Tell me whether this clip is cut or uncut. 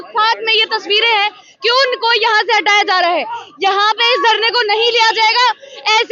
uncut